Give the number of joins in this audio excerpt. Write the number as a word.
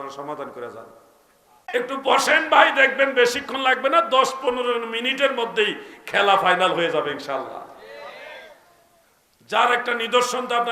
one